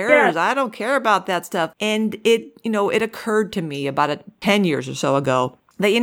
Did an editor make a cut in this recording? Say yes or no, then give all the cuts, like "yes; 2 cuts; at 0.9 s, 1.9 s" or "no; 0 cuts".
yes; 2 cuts; at 1.7 s, 4.3 s